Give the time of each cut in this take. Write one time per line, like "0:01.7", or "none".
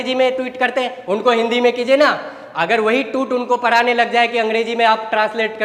none